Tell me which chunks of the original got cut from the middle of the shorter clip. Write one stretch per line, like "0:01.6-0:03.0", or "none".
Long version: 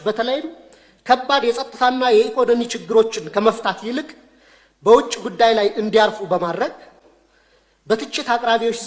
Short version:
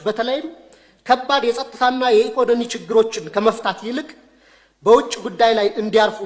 none

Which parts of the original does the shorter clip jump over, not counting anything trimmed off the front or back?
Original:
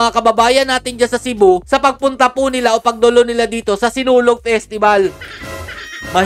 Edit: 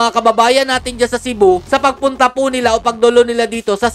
none

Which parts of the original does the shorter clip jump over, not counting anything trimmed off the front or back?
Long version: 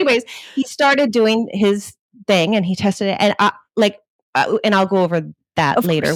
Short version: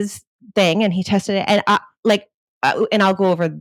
none

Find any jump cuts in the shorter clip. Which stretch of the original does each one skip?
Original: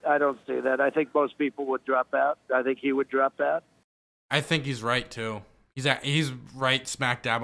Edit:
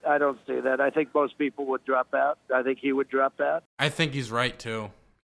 0:03.7-0:04.2

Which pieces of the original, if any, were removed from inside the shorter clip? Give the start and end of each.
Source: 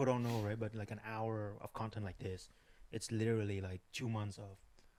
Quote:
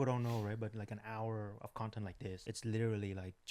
0:02.4-0:02.9

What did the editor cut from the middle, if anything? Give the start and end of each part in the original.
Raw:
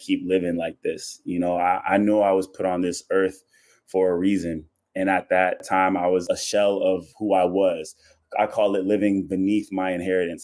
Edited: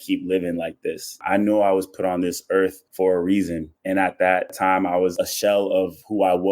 0:01.2-0:01.8
0:03.4-0:03.8
0:04.6-0:04.8

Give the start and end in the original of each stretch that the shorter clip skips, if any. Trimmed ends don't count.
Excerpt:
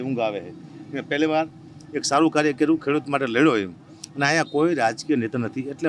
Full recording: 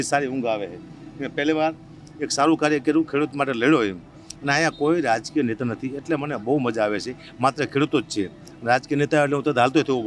none

